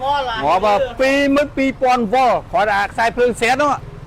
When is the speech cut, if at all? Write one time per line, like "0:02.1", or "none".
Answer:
0:01.4